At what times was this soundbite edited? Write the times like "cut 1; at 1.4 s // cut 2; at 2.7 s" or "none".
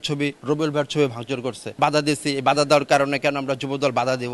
cut 1; at 1.8 s